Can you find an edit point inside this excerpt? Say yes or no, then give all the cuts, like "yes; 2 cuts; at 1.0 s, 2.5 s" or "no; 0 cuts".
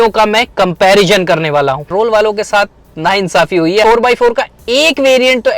yes; 2 cuts; at 1.8 s, 3.8 s